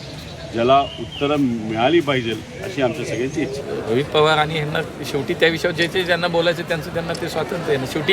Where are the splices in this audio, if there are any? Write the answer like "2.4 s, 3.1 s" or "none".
3.6 s